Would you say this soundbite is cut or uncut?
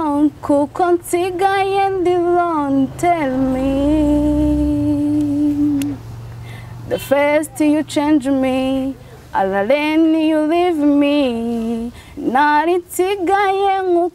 uncut